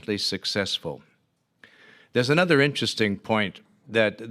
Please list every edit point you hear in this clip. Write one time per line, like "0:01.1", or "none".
0:01.4